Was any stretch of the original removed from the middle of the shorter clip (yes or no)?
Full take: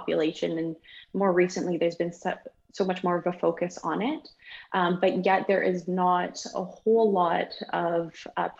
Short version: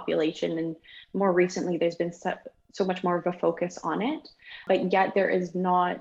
yes